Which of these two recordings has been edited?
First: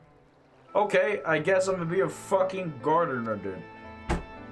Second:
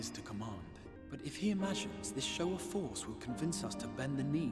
second; 1 cut; at 0.9 s

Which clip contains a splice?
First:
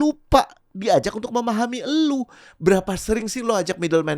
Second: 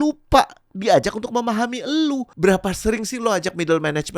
second; 1 cut; at 2.3 s

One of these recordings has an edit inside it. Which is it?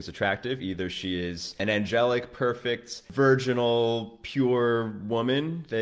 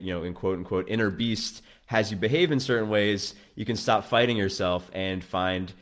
first; 2 cuts; at 1.6 s, 3.1 s

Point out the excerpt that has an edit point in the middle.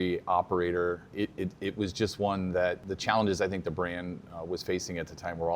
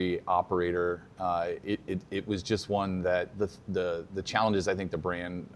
first; 2 cuts; at 1.1 s, 2.8 s

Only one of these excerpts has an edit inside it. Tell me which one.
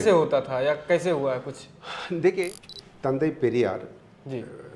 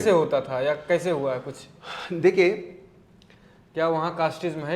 first; 1 cut; at 2.5 s

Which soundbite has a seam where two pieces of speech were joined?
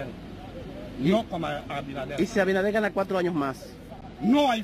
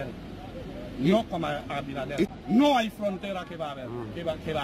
second; 1 cut; at 2.3 s

